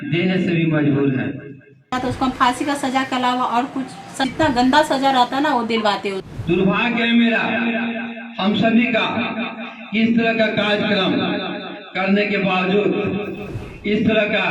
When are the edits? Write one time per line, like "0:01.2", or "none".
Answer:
0:01.9
0:04.3
0:06.3